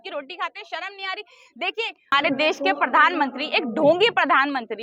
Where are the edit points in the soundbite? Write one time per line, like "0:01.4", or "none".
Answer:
0:02.1